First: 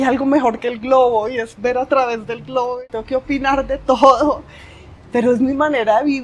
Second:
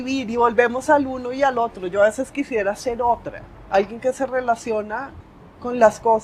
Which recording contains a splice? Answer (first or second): first